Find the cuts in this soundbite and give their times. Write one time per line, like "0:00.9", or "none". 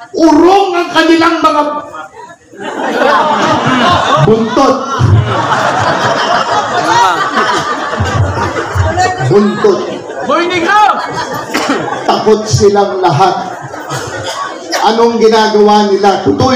none

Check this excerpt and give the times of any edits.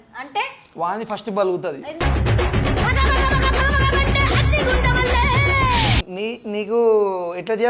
0:06.0

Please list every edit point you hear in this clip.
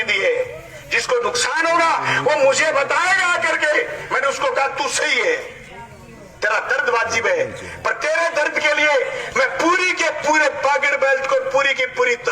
none

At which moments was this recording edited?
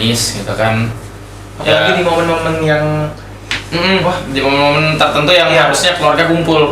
none

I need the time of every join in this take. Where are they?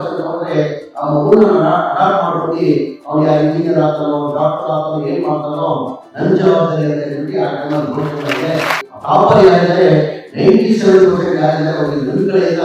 0:08.9

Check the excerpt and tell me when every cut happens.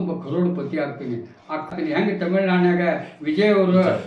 0:01.7

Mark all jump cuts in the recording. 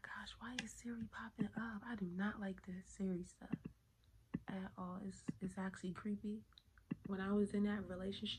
0:07.0

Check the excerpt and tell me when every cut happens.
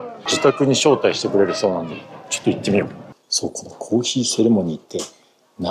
0:03.0

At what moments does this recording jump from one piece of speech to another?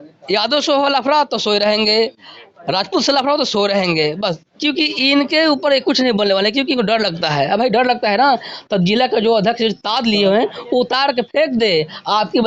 none

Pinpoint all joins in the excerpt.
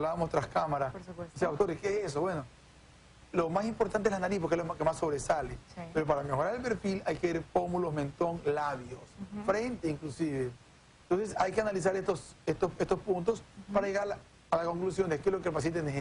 0:11.6

